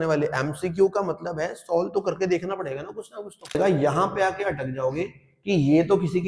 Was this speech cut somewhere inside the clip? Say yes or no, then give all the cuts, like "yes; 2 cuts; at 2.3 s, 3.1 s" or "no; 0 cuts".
yes; 1 cut; at 3.6 s